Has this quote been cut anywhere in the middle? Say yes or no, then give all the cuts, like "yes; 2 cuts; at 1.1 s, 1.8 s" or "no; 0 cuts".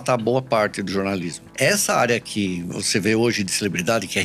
yes; 1 cut; at 1.4 s